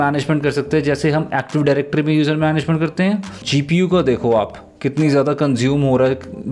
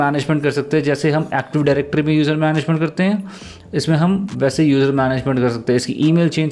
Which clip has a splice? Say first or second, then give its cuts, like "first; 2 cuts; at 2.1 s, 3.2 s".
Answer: first; 1 cut; at 3.4 s